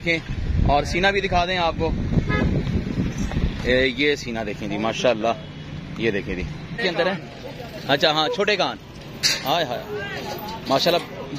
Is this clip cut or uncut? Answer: cut